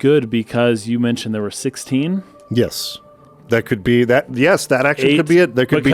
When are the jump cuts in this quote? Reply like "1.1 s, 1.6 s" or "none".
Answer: none